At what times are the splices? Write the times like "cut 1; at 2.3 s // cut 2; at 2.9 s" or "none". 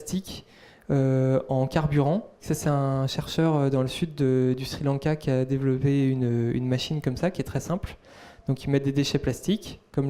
cut 1; at 2.5 s